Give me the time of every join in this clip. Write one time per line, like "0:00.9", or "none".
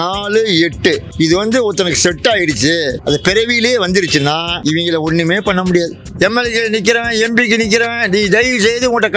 0:01.1
0:03.0
0:04.5
0:06.0